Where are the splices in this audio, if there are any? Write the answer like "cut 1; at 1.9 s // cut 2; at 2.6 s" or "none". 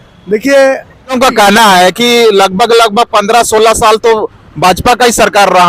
cut 1; at 1.2 s